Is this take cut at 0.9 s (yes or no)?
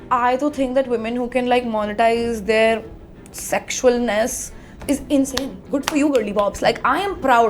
no